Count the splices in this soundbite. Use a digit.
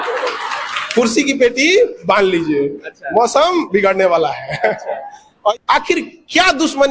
1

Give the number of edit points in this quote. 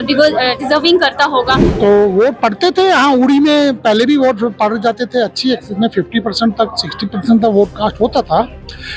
1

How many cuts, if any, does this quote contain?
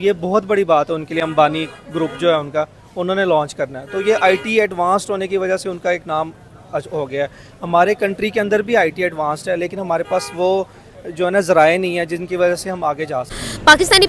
0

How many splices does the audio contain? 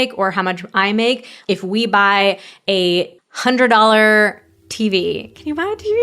1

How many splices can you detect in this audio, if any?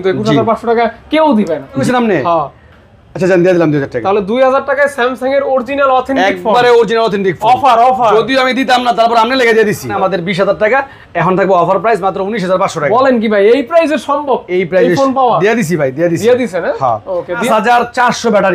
3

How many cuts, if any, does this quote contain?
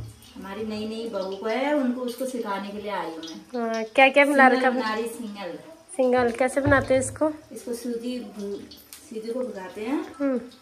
0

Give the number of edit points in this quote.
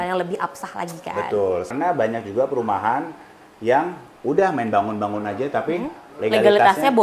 1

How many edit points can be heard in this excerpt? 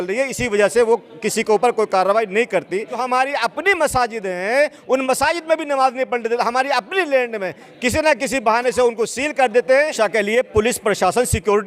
2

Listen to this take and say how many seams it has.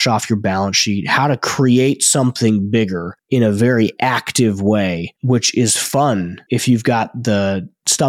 2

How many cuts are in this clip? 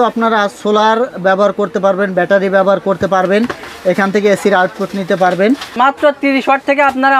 1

